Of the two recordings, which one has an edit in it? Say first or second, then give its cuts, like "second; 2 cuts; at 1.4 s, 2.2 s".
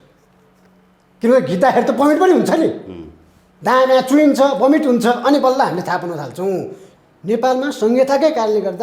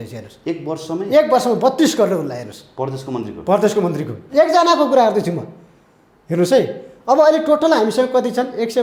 first; 1 cut; at 6.8 s